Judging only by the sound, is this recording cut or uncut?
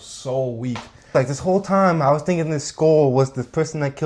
cut